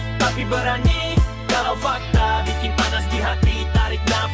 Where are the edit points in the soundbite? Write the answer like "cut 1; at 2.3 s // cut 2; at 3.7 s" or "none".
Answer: none

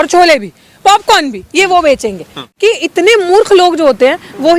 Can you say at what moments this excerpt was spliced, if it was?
cut 1; at 2.4 s

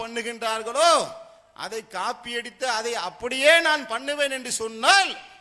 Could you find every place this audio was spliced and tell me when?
none

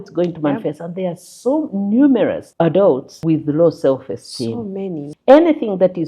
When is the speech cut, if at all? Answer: cut 1; at 2.4 s // cut 2; at 3.1 s // cut 3; at 5.1 s

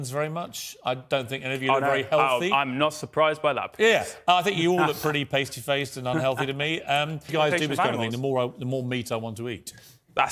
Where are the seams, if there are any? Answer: cut 1; at 7.3 s

